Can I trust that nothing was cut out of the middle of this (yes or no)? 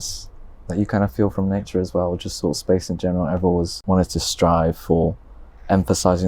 no